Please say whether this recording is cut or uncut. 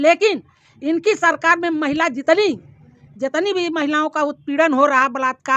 uncut